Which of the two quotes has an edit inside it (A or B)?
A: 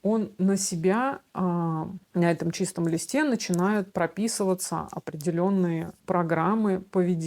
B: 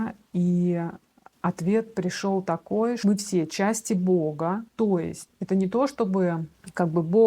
B